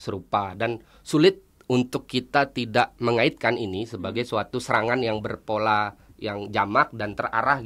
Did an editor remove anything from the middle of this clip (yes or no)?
no